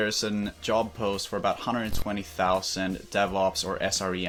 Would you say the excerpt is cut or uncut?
uncut